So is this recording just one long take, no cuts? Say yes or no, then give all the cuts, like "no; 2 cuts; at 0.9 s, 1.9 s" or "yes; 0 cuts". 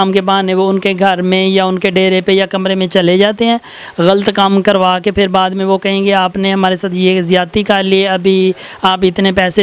yes; 0 cuts